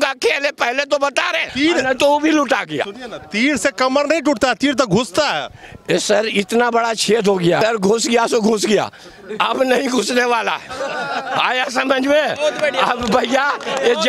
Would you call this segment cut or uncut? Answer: cut